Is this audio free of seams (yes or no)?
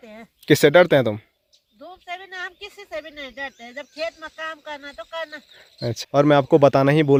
yes